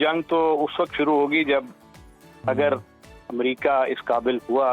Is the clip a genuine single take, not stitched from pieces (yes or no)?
yes